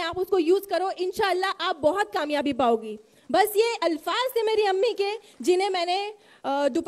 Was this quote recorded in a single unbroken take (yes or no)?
yes